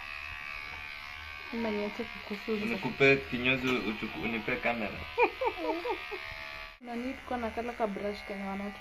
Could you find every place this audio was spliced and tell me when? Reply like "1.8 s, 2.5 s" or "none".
6.8 s